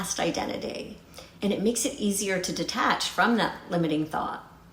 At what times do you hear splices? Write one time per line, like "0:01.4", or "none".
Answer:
none